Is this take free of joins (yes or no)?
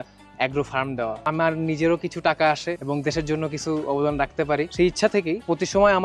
yes